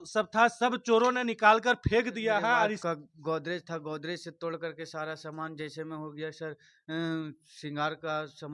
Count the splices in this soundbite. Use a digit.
1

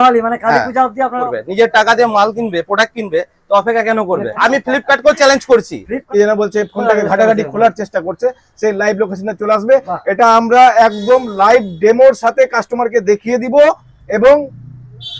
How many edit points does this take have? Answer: 3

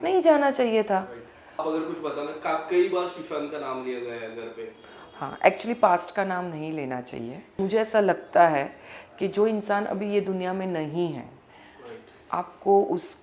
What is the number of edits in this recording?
2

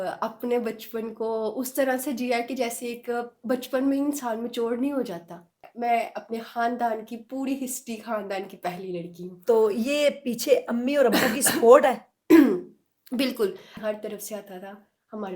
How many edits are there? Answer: 2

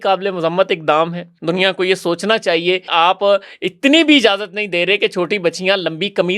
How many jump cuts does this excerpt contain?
2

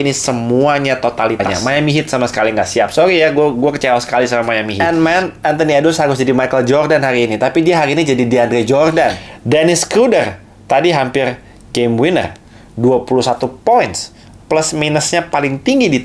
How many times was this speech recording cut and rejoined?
3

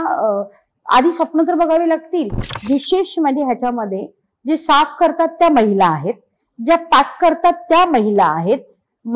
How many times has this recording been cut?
1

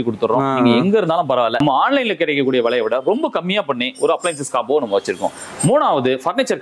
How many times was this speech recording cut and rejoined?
1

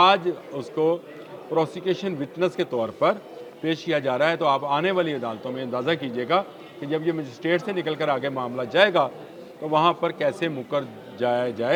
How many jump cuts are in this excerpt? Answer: 0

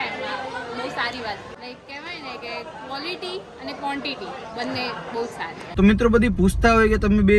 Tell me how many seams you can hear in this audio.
2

